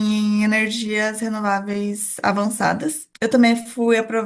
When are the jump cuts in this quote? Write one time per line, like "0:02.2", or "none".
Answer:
0:03.0